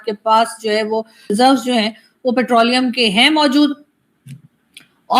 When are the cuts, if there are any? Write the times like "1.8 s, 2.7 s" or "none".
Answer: 1.3 s